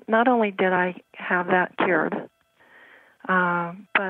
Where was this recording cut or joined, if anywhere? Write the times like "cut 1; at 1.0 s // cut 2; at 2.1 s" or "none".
none